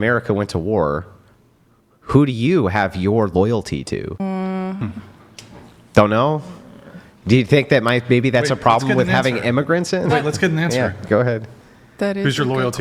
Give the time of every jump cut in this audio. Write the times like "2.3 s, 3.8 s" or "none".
4.1 s